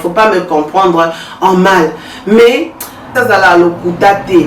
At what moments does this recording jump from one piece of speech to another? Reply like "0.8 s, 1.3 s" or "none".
3.1 s